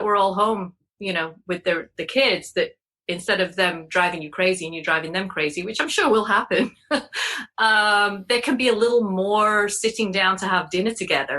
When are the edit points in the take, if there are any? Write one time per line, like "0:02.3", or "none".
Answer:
none